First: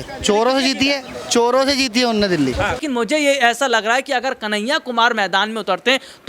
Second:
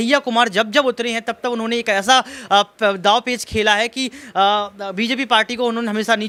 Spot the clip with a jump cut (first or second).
first